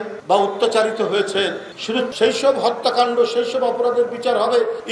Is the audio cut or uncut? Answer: cut